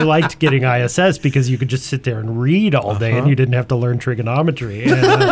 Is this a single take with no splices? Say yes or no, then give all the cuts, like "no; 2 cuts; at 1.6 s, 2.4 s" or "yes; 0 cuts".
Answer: yes; 0 cuts